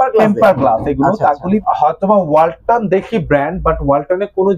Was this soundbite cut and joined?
yes; 1 cut; at 1.6 s

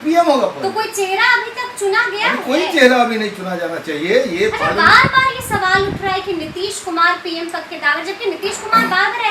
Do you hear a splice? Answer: no; 0 cuts

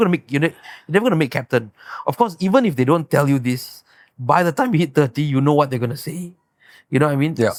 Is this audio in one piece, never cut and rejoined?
yes; 0 cuts

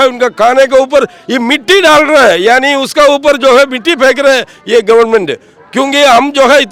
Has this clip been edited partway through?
no; 0 cuts

